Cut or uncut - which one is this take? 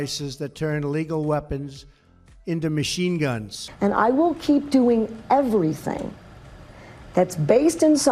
cut